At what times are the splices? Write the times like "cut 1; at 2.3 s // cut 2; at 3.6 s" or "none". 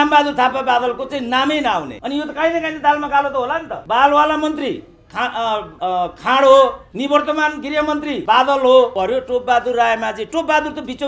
cut 1; at 2.0 s // cut 2; at 3.8 s // cut 3; at 5.7 s // cut 4; at 6.9 s // cut 5; at 8.2 s // cut 6; at 8.9 s